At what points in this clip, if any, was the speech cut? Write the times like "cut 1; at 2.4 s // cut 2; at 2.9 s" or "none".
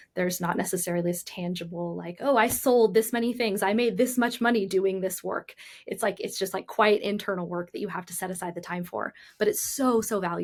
none